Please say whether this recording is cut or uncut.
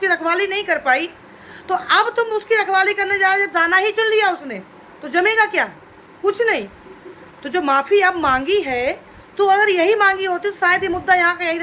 uncut